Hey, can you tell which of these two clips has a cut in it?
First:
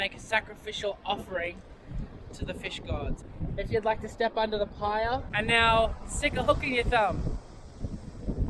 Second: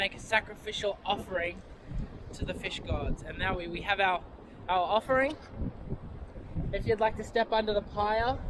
first; 2 cuts; at 3.2 s, 5.3 s

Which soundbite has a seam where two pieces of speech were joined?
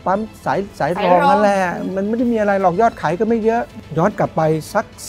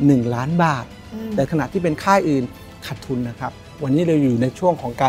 second; 2 cuts; at 1.5 s, 3.7 s

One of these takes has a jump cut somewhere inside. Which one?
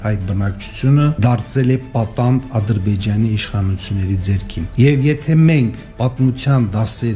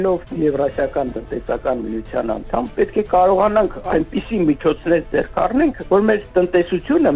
first; 3 cuts; at 1.2 s, 4.7 s, 5.9 s

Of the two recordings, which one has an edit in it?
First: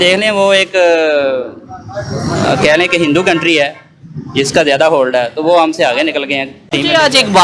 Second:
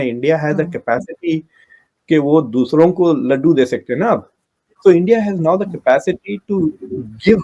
first; 1 cut; at 6.5 s

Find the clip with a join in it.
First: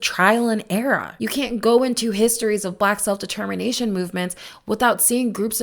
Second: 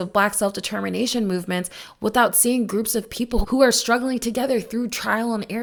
first; 1 cut; at 1.1 s

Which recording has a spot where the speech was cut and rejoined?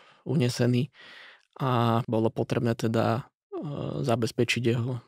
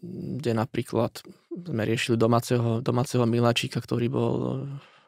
first; 1 cut; at 2.0 s

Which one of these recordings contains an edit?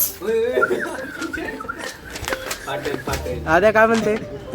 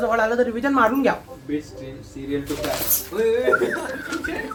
first; 1 cut; at 3.3 s

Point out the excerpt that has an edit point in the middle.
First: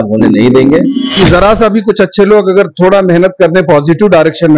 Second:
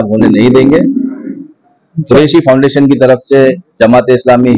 first; 1 cut; at 1.2 s

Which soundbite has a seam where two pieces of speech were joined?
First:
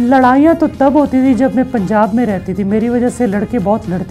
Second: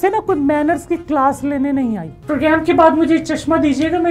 second; 1 cut; at 2.1 s

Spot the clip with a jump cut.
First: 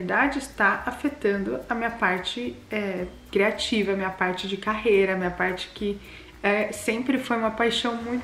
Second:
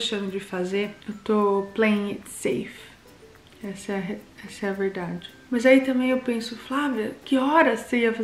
second; 2 cuts; at 1.0 s, 5.4 s

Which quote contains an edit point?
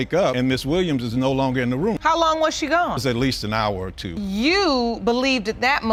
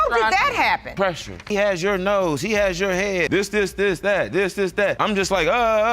second; 3 cuts; at 1.4 s, 3.3 s, 5.0 s

